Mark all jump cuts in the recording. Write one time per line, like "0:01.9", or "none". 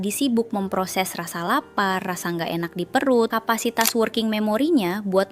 0:03.3